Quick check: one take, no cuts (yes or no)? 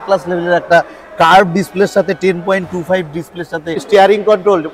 no